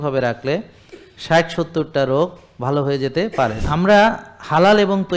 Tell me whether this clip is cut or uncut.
cut